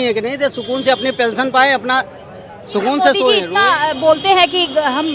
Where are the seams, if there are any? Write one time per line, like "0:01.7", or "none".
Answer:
0:03.5